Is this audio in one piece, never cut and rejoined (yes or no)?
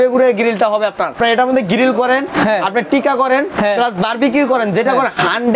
no